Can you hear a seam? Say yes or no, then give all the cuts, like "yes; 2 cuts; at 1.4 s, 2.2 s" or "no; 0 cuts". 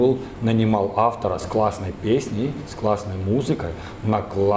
no; 0 cuts